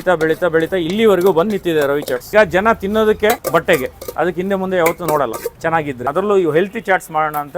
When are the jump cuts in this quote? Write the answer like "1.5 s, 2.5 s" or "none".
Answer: 2.3 s, 6.1 s